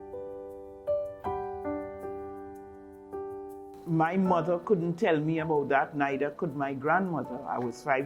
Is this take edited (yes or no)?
yes